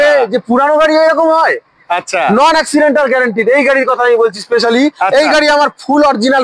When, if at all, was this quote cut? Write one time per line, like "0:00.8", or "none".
none

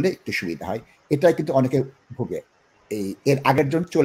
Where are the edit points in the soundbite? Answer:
none

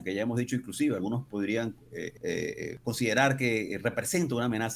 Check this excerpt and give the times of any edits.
0:02.2
0:02.8

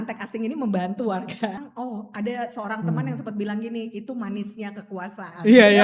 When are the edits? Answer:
0:01.7

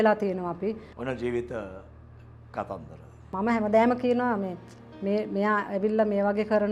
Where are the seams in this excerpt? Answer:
0:00.9
0:03.2

